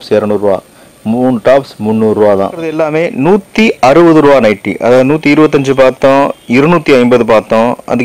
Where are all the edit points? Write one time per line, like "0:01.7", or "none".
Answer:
0:02.8